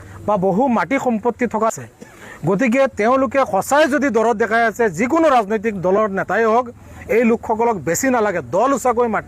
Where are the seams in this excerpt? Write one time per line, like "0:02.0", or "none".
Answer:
0:01.7